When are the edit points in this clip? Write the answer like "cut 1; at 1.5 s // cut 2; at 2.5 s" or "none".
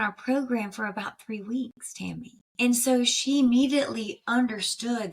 cut 1; at 2.4 s